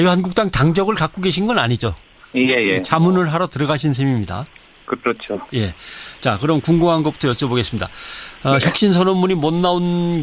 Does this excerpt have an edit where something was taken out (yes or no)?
yes